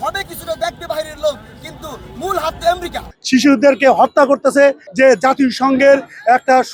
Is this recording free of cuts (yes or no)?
no